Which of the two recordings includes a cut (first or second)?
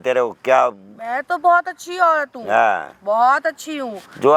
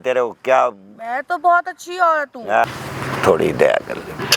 second